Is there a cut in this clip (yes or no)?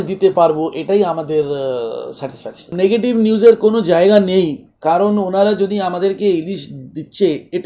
no